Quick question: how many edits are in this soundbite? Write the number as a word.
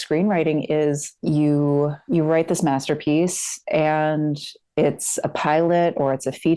zero